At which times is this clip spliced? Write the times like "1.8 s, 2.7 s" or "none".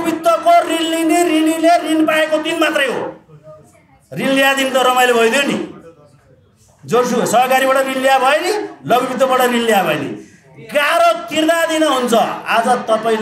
none

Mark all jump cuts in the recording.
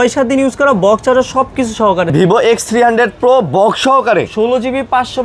2.1 s

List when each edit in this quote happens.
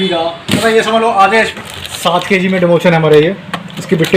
1.6 s

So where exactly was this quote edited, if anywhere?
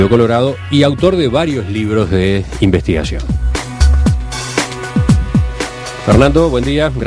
5.7 s

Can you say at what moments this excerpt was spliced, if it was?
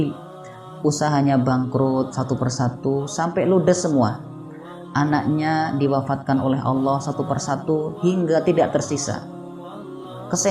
none

